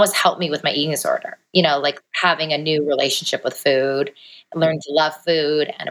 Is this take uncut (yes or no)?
no